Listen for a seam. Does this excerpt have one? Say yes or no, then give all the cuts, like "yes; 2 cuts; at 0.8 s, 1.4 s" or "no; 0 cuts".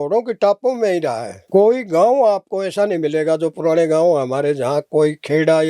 yes; 1 cut; at 1.3 s